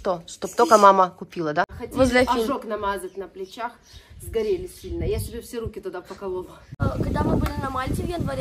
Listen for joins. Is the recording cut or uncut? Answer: cut